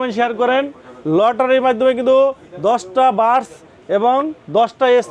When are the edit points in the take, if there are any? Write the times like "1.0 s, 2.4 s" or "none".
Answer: none